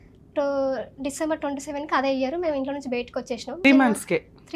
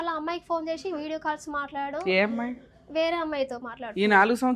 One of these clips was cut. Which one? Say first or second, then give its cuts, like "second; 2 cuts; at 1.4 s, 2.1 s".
first; 1 cut; at 3.6 s